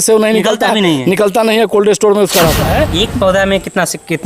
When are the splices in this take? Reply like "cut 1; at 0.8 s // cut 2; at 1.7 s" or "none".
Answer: cut 1; at 2.7 s